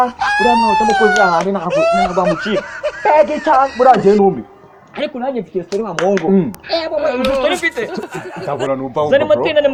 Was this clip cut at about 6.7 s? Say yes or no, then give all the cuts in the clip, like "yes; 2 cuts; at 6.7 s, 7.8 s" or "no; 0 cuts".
no; 0 cuts